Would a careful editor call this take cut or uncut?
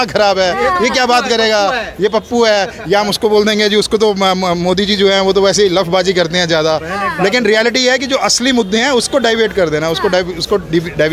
uncut